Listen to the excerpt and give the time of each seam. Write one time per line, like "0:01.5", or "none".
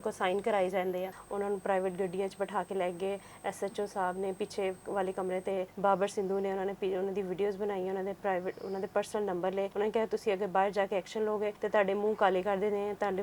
0:01.2
0:05.7
0:09.7
0:11.6